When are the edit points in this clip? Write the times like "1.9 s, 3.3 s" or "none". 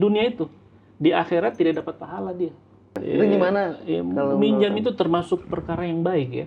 2.9 s